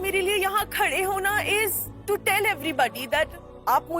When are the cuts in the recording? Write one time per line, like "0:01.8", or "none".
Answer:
0:01.9